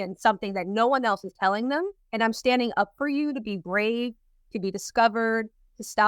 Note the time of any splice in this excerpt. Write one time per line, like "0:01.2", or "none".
0:02.0